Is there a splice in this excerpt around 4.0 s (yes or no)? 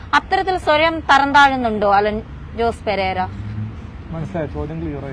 no